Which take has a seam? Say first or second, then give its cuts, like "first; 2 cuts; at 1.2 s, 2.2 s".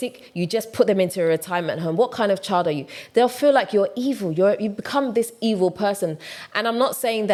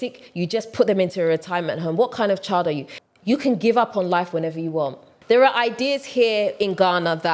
second; 2 cuts; at 2.9 s, 5.1 s